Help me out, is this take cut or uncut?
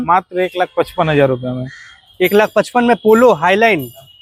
uncut